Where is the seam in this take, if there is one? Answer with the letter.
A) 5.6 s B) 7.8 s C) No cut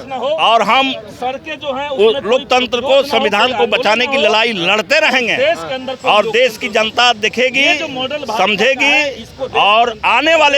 C